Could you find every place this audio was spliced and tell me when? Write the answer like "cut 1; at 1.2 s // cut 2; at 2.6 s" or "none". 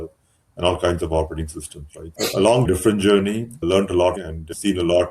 cut 1; at 2.7 s // cut 2; at 3.5 s // cut 3; at 4.2 s